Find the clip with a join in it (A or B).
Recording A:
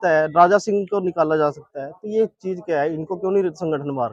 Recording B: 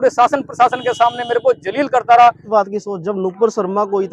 B